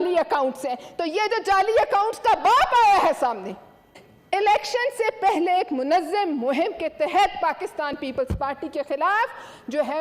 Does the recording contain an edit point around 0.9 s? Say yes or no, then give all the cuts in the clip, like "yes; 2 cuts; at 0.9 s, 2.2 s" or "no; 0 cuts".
no; 1 cut; at 3.8 s